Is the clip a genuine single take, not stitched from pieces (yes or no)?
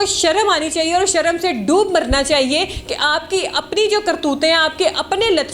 yes